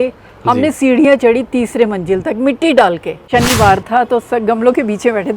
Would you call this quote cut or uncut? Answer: cut